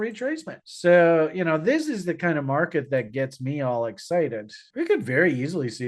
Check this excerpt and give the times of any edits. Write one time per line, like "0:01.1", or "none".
0:04.6